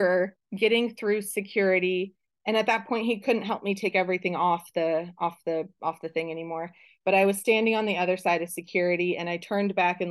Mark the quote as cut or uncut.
uncut